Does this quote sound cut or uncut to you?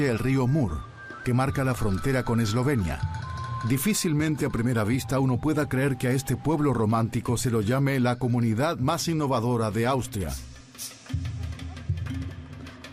cut